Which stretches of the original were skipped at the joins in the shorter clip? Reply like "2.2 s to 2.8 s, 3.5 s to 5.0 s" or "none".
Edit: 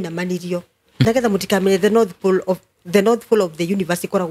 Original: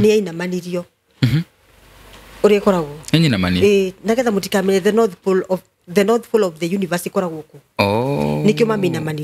1.3 s to 4.1 s

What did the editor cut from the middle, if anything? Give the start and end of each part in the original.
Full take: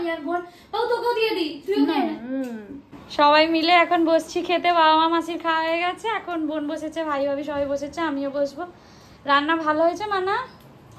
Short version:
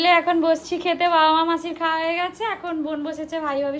none

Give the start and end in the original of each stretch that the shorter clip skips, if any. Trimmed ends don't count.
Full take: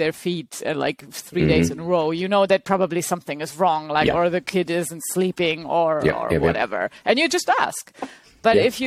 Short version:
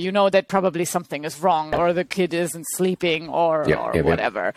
3.9 s to 4.1 s

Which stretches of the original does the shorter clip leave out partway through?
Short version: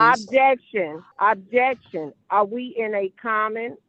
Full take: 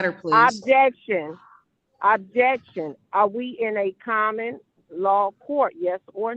1.4 s to 1.9 s

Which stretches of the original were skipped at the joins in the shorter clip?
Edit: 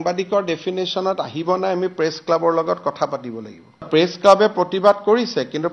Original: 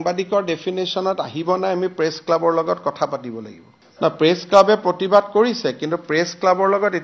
3.9 s to 4.1 s

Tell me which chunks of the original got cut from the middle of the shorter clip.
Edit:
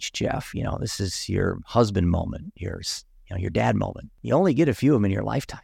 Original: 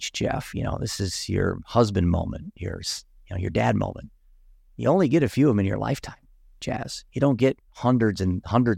4.1 s to 4.6 s

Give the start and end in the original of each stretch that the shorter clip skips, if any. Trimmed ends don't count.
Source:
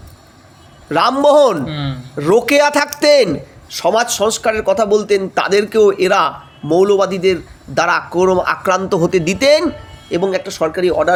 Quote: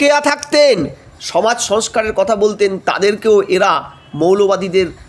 none

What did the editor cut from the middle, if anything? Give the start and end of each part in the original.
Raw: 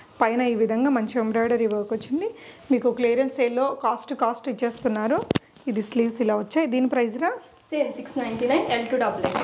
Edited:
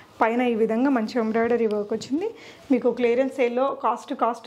none

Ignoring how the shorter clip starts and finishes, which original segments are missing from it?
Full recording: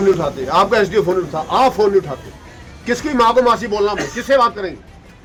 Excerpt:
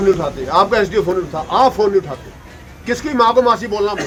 none

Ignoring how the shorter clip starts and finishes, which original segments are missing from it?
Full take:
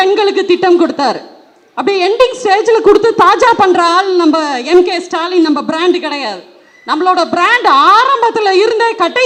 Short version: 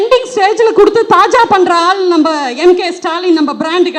none

